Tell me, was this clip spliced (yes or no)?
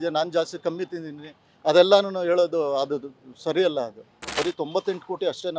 yes